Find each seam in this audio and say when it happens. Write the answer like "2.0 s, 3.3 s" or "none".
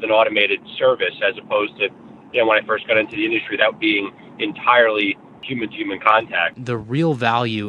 5.4 s, 6.6 s